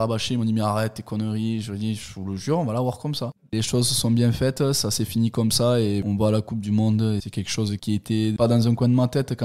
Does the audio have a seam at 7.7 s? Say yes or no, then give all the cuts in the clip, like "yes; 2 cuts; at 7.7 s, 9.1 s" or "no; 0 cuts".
no; 2 cuts; at 3.4 s, 6.0 s